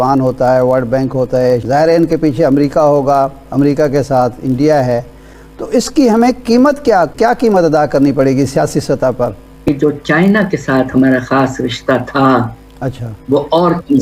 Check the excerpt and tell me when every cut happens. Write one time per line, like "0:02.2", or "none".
0:01.6
0:09.7